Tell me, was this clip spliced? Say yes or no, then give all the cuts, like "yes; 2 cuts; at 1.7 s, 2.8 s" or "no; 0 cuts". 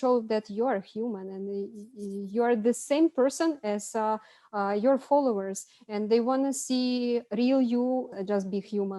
yes; 1 cut; at 8.1 s